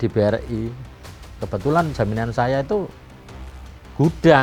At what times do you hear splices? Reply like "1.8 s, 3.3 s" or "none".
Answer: none